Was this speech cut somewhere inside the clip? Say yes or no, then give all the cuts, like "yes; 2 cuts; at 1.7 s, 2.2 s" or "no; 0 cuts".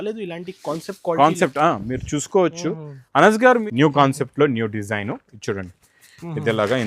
yes; 1 cut; at 3.6 s